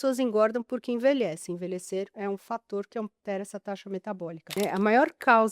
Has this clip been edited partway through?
yes; 1 cut; at 4.4 s

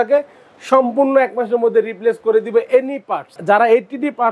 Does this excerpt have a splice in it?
yes; 1 cut; at 3.3 s

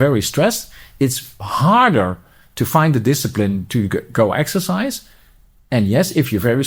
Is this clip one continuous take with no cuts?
yes; 0 cuts

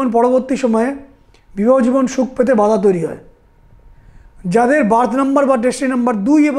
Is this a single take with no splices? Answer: yes; 0 cuts

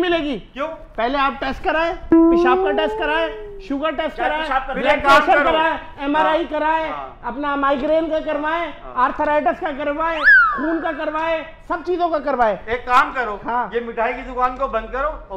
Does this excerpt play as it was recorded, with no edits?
yes; 0 cuts

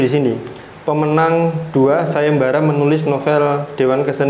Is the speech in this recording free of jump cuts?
yes; 0 cuts

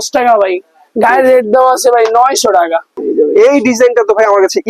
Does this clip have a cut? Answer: yes; 1 cut; at 3.0 s

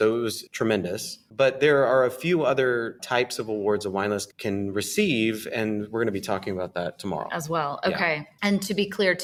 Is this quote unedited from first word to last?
yes; 0 cuts

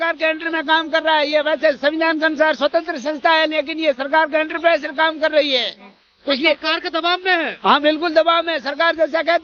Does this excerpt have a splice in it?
no; 0 cuts

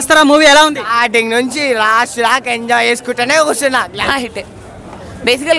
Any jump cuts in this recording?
yes; 1 cut; at 4.0 s

